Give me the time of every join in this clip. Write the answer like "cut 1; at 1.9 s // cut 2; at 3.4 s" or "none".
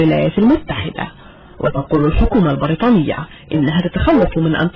none